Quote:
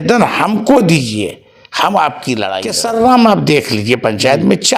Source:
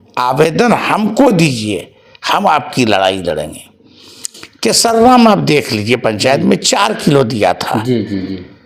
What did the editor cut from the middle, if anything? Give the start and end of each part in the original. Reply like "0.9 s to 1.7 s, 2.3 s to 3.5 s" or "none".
3.1 s to 4.6 s

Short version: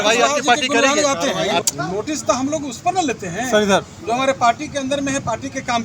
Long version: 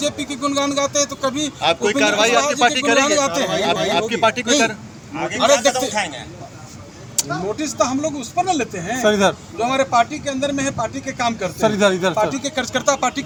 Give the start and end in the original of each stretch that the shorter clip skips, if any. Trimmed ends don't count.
3.8 s to 7.1 s

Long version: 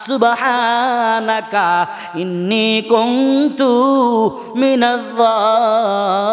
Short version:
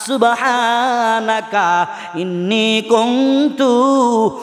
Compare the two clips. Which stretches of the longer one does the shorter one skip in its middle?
none

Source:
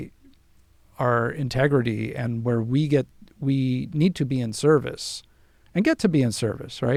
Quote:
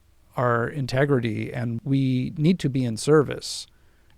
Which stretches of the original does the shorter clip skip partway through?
2.3 s to 3.2 s

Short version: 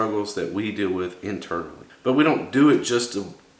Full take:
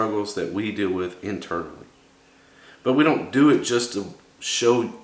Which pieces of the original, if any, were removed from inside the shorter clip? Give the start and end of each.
1.8 s to 2.6 s

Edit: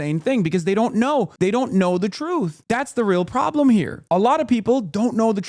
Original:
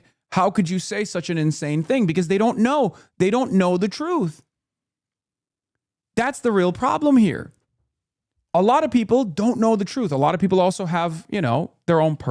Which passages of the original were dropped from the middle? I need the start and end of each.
2.9 s to 3.1 s, 4.4 s to 6.0 s, 7.4 s to 8.4 s

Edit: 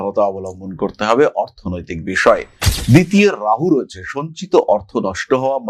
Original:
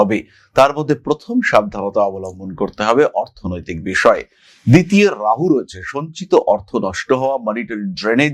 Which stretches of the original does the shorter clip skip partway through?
none

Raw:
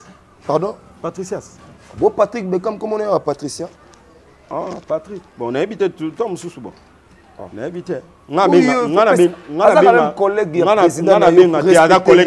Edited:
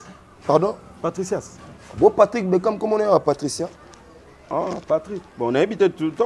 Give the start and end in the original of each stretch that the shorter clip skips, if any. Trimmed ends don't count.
none

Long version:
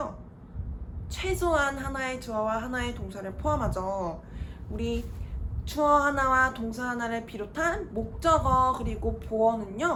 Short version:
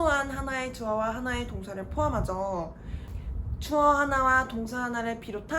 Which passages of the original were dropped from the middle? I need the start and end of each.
4.6 s to 5.2 s

